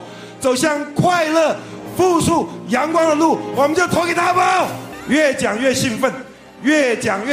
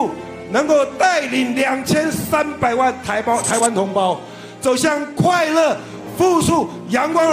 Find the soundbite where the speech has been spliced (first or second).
first